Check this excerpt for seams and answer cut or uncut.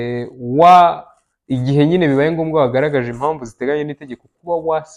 uncut